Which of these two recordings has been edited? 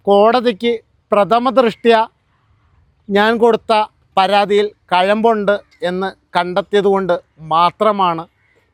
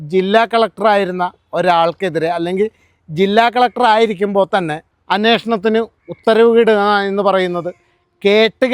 second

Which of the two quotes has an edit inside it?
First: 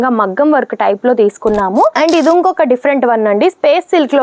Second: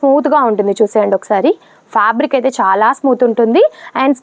first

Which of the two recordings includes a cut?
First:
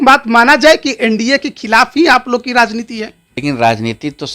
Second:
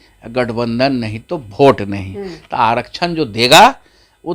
first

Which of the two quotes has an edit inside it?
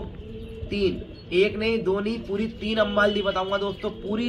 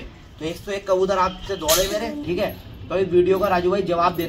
second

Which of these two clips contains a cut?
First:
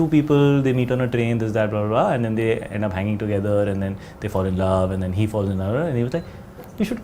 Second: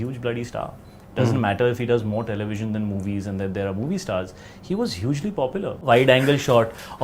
second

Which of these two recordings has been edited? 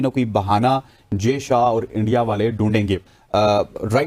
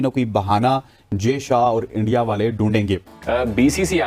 second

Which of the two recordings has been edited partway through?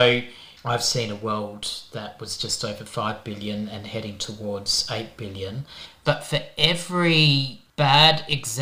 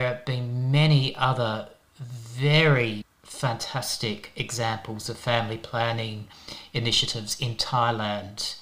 first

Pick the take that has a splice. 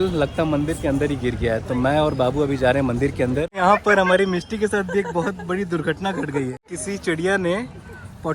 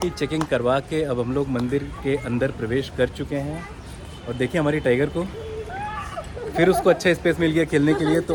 first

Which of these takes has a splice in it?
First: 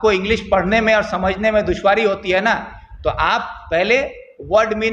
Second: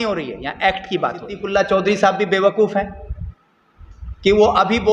second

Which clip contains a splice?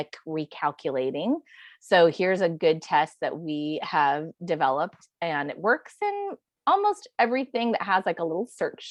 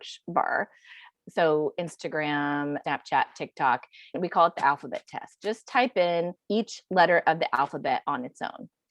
second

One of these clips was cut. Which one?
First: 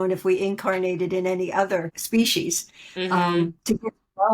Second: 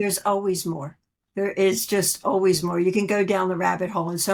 first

